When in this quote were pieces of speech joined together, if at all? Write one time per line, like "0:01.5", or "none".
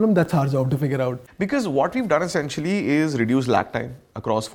0:01.2